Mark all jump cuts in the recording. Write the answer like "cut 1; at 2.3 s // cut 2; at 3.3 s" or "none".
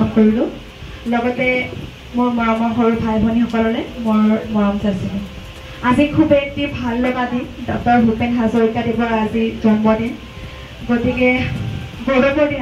none